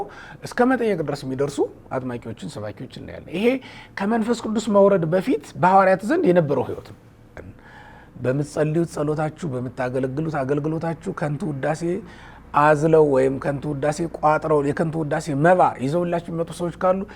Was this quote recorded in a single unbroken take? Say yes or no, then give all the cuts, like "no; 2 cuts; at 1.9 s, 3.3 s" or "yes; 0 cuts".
no; 1 cut; at 7.5 s